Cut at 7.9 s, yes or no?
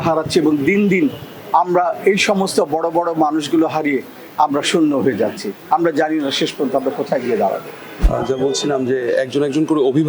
yes